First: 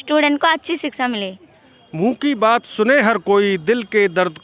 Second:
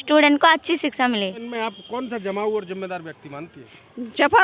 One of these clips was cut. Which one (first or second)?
second